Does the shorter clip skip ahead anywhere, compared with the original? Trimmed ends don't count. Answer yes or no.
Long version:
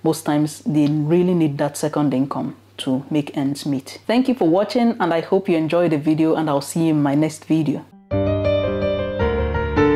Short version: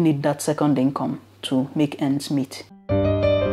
yes